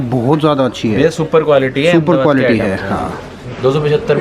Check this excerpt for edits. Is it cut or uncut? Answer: uncut